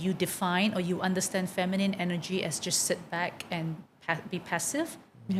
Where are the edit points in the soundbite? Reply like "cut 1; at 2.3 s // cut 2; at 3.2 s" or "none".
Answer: none